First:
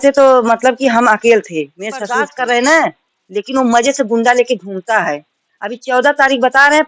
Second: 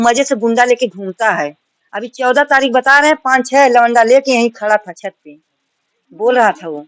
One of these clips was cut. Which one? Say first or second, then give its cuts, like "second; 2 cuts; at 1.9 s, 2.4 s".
first; 1 cut; at 2.3 s